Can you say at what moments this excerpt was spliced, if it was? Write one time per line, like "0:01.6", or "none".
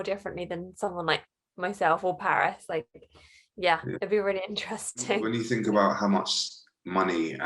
0:05.3